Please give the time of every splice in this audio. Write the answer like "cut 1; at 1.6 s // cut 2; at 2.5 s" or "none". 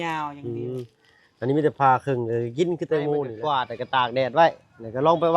cut 1; at 3.3 s